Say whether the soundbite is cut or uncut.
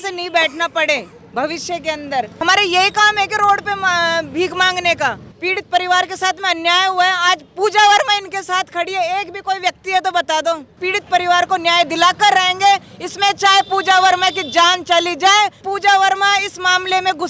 cut